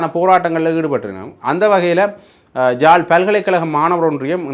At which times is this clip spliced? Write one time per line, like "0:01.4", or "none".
none